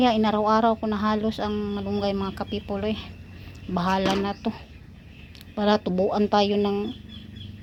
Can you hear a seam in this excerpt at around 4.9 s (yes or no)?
no